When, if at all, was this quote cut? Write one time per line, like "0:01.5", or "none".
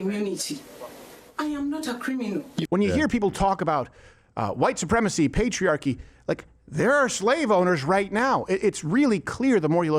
0:02.6